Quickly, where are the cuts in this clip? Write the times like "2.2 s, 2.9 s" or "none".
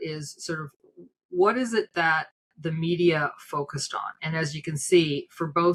none